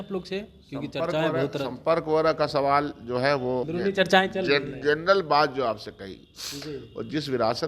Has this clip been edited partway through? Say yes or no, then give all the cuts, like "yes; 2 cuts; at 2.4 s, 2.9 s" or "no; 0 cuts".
yes; 1 cut; at 3.7 s